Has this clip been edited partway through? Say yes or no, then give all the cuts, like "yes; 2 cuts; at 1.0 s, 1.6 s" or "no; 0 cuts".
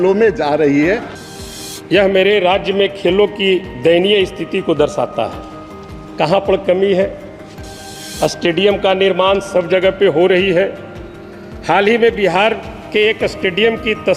yes; 1 cut; at 1.1 s